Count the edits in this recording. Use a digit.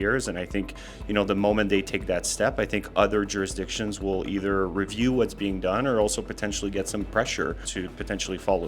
1